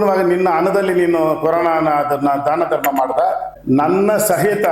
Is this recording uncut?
no; 1 cut; at 3.5 s

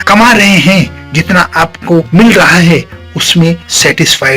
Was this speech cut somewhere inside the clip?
no; 0 cuts

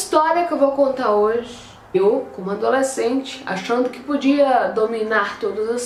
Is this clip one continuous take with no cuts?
yes; 0 cuts

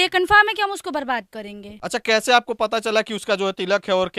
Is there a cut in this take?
yes; 1 cut; at 1.7 s

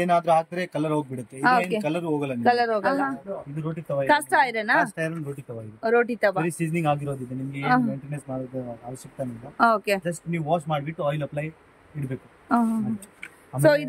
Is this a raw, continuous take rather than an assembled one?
no; 1 cut; at 3.0 s

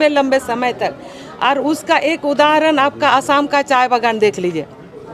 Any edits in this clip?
no; 0 cuts

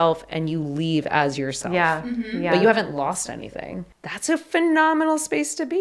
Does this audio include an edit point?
yes; 1 cut; at 4.0 s

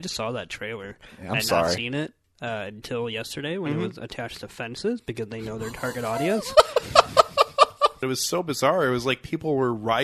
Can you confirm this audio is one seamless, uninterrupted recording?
no; 1 cut; at 8.0 s

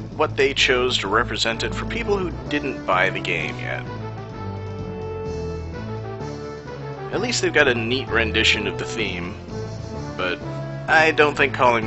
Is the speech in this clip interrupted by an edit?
no; 0 cuts

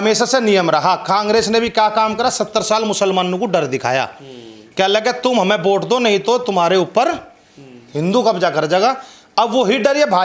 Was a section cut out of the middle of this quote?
no; 0 cuts

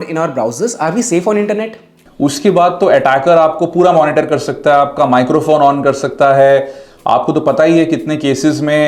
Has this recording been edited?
yes; 1 cut; at 1.9 s

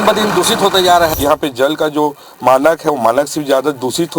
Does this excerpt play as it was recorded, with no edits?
no; 1 cut; at 1.1 s

